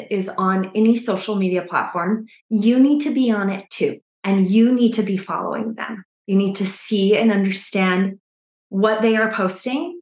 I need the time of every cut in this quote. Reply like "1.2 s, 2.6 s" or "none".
none